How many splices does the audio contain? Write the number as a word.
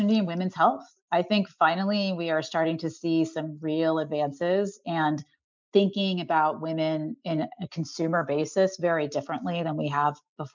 zero